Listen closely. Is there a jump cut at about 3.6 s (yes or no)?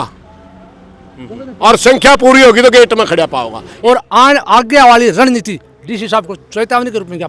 yes